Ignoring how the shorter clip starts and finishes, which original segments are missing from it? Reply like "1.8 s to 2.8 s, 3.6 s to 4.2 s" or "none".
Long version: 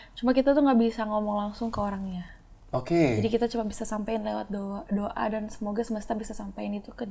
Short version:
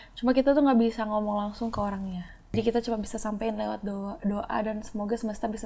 2.5 s to 3.2 s